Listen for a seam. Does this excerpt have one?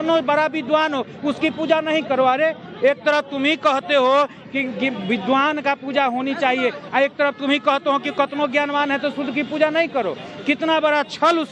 no; 0 cuts

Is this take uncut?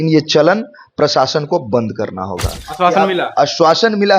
no; 1 cut; at 2.6 s

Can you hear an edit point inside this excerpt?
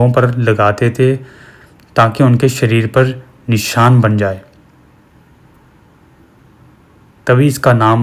no; 0 cuts

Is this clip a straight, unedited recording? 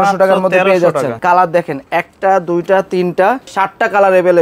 no; 2 cuts; at 1.2 s, 3.5 s

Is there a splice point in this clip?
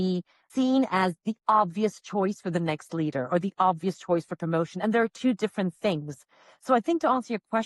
no; 0 cuts

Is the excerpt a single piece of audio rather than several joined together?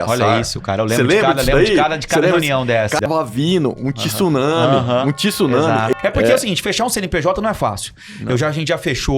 no; 2 cuts; at 3.0 s, 5.9 s

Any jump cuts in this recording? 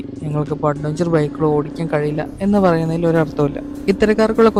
no; 0 cuts

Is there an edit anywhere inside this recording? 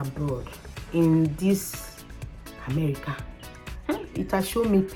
no; 0 cuts

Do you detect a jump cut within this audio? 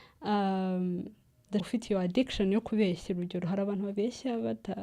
yes; 1 cut; at 1.7 s

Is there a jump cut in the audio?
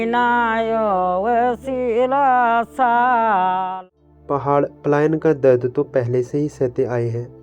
yes; 1 cut; at 3.7 s

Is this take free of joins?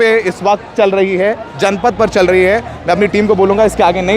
yes; 0 cuts

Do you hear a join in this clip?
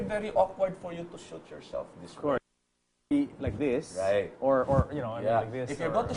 yes; 1 cut; at 1.1 s

